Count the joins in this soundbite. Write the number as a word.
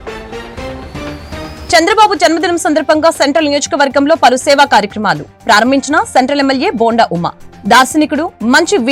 one